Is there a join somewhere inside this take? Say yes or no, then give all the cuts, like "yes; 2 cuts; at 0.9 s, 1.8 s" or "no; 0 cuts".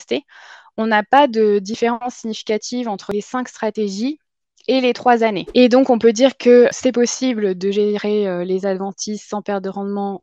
yes; 3 cuts; at 3.0 s, 5.4 s, 6.8 s